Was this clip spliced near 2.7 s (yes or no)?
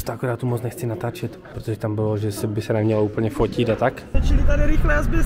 no